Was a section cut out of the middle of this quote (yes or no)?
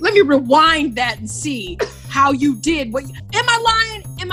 yes